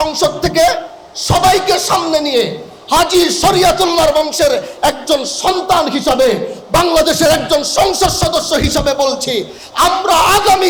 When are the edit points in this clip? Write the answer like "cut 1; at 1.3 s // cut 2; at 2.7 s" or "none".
none